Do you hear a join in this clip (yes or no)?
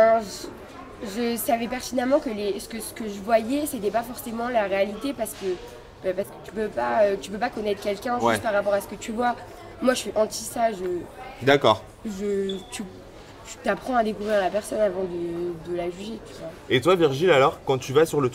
no